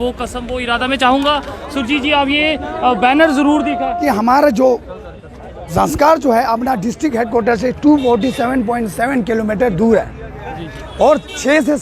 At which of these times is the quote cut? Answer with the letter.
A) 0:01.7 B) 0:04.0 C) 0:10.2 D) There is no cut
B